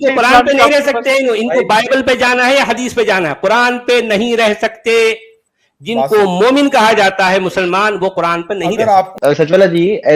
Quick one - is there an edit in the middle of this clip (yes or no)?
yes